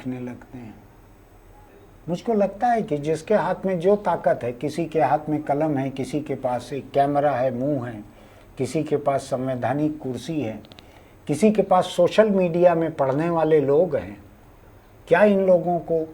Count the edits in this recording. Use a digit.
1